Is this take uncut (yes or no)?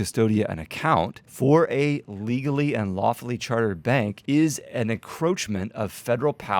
no